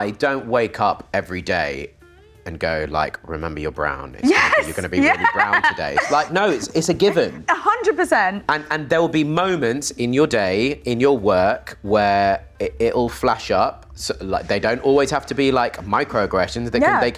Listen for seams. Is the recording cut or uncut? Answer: uncut